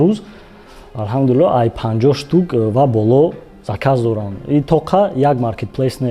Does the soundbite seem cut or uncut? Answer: uncut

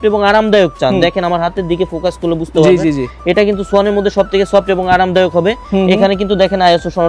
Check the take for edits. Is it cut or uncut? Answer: uncut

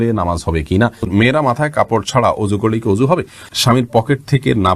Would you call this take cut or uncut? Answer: cut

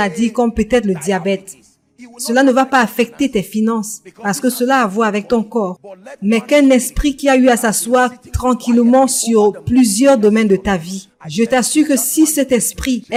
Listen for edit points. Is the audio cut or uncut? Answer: uncut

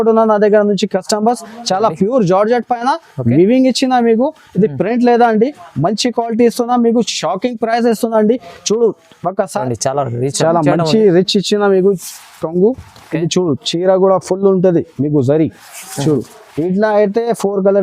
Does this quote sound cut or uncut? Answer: cut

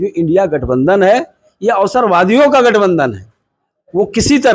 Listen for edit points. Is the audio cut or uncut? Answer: uncut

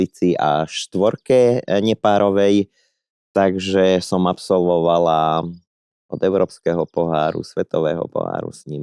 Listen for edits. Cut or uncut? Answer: uncut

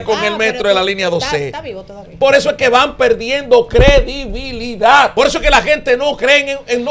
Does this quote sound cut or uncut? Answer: cut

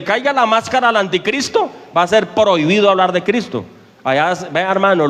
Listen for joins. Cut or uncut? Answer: uncut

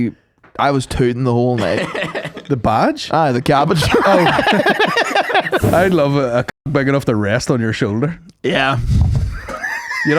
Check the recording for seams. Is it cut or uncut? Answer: cut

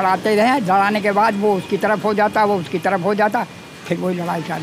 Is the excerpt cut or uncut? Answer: uncut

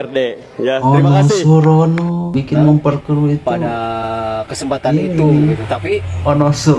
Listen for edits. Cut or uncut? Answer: cut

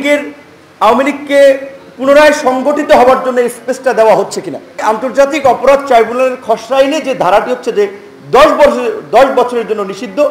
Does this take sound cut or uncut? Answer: cut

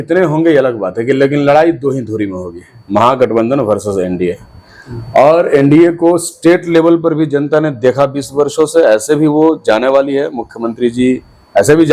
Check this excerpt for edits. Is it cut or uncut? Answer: uncut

